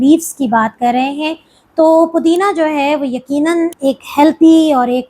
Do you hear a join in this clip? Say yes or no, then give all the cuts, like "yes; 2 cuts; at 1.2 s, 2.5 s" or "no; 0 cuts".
yes; 1 cut; at 3.7 s